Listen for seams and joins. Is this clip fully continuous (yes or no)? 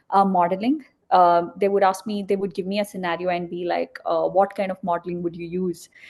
yes